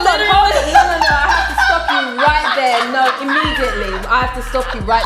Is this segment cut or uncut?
uncut